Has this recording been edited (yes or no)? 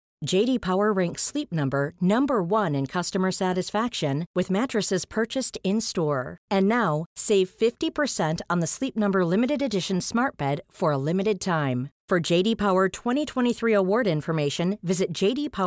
no